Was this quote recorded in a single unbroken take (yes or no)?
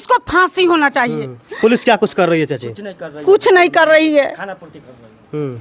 yes